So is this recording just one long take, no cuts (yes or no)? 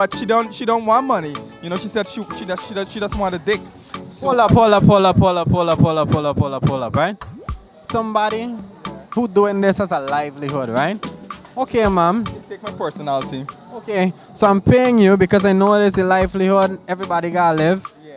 yes